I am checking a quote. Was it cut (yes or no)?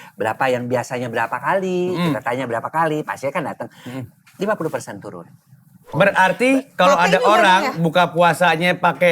yes